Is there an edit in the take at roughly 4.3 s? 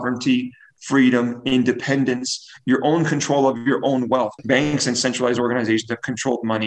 yes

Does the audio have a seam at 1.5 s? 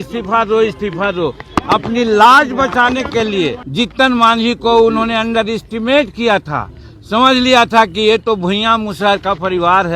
no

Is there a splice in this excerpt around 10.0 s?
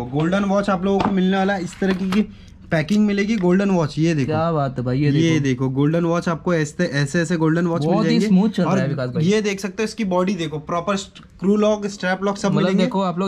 no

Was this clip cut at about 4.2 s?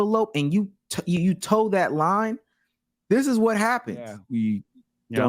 yes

